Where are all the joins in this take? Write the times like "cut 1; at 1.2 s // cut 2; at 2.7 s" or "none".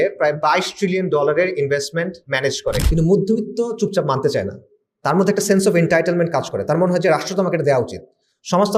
cut 1; at 2.8 s